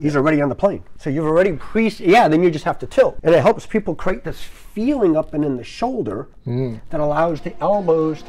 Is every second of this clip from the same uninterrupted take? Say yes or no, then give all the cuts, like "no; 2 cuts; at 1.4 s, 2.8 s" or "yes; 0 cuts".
no; 2 cuts; at 0.9 s, 3.2 s